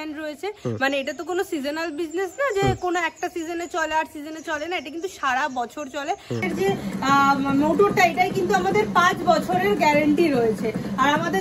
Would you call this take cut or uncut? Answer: cut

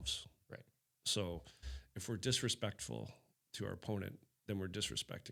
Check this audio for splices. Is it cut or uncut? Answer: uncut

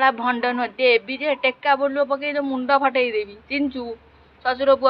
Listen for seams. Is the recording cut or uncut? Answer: uncut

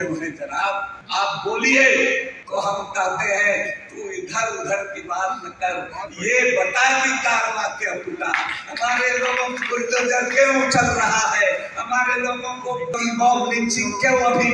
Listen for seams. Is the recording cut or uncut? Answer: cut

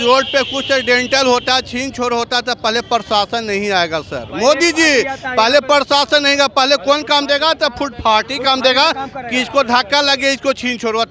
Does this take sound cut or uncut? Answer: uncut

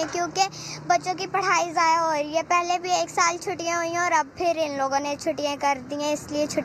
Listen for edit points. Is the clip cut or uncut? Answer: uncut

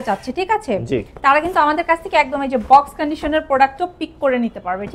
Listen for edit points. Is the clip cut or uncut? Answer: uncut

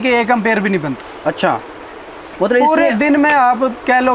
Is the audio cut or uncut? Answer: uncut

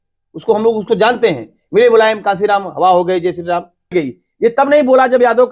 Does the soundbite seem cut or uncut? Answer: cut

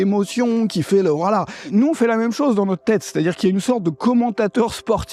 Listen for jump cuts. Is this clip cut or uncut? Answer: cut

